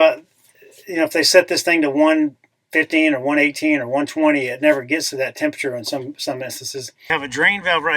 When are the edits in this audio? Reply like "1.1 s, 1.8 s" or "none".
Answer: 7.0 s